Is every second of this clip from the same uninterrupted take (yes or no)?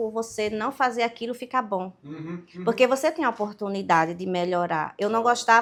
yes